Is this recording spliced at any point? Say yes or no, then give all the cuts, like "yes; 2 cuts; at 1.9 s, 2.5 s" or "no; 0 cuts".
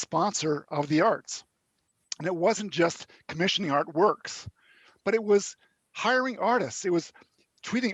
no; 0 cuts